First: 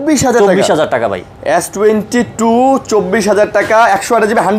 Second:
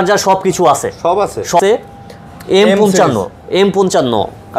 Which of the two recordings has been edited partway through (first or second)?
second